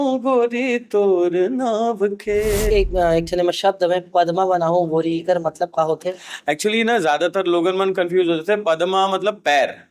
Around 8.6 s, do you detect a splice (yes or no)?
no